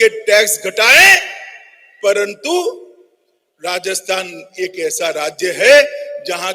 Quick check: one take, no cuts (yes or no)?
yes